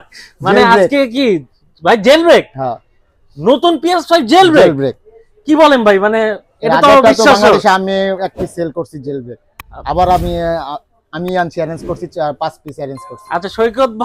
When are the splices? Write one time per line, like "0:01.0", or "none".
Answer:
none